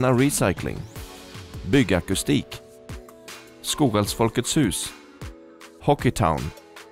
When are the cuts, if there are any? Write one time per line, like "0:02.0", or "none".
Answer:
none

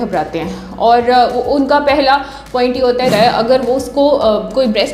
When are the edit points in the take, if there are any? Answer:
0:03.1

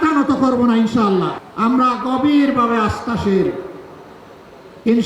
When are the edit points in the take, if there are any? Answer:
0:01.4

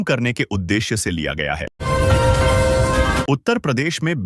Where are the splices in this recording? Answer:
0:01.8
0:03.2

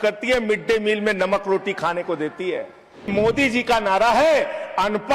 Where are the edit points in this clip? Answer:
0:03.1

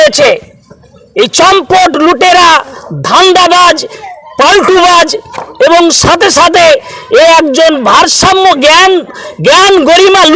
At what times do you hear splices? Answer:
none

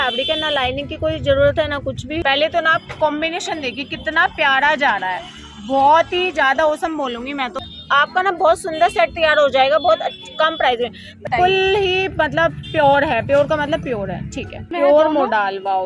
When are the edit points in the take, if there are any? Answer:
0:02.2
0:07.6
0:11.2
0:14.6

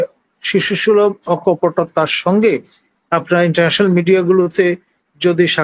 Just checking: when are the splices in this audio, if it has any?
none

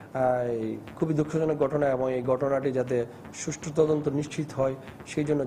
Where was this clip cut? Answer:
none

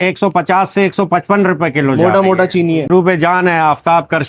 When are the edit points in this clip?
0:02.9

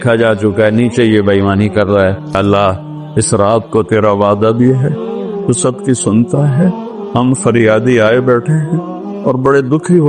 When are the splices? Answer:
0:02.4

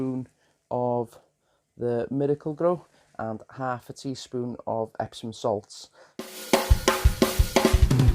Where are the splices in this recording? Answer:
0:06.4

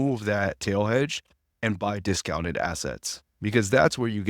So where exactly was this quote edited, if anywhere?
none

